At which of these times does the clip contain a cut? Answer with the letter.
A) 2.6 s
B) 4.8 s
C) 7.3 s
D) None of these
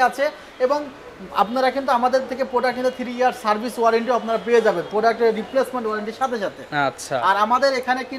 D